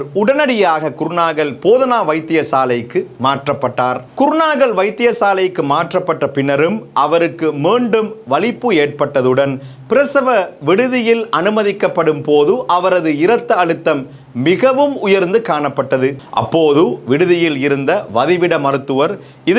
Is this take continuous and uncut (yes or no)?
yes